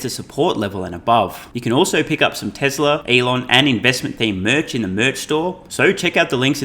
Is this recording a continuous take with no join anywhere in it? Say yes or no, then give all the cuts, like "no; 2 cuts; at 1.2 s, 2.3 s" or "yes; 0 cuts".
no; 3 cuts; at 1.5 s, 3.0 s, 5.6 s